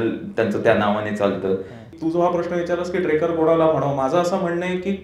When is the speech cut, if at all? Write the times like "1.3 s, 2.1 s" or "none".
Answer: 1.9 s